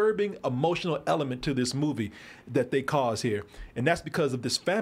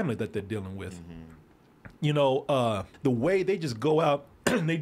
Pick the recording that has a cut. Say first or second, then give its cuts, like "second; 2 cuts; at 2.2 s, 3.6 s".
second; 1 cut; at 2.9 s